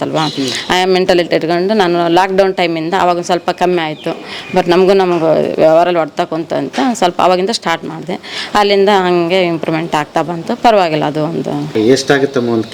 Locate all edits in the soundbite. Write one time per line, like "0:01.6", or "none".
0:11.7